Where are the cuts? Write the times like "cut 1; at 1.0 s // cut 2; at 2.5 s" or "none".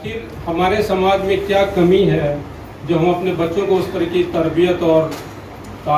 none